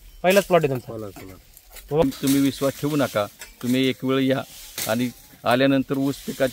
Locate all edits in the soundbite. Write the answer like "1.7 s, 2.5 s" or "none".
2.0 s